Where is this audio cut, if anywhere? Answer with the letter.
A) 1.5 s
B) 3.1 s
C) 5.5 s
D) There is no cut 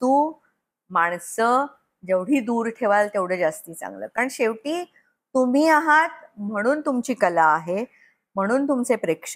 D